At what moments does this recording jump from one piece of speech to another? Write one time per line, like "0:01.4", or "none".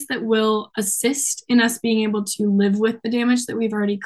none